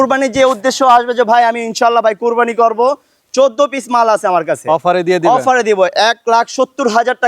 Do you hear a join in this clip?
no; 0 cuts

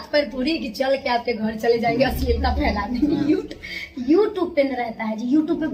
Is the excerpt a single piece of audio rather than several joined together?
yes; 0 cuts

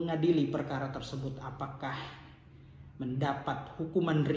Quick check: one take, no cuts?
yes; 0 cuts

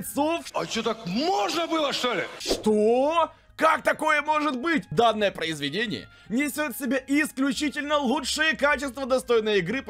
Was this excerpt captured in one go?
no; 1 cut; at 4.9 s

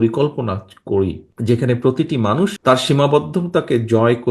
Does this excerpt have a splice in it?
yes; 2 cuts; at 1.3 s, 2.6 s

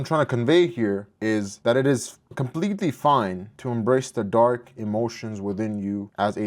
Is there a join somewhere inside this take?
no; 0 cuts

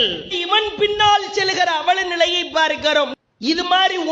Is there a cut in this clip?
yes; 1 cut; at 3.2 s

